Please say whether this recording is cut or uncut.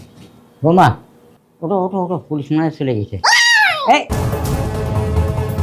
cut